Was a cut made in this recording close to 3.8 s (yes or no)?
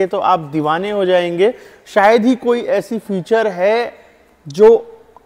no